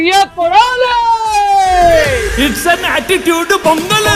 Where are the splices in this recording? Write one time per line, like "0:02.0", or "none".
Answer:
none